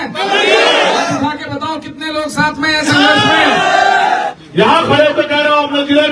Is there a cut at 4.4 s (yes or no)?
yes